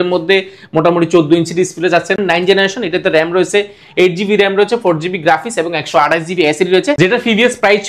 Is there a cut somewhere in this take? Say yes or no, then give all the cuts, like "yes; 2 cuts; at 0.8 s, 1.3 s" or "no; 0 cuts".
yes; 2 cuts; at 2.2 s, 7.0 s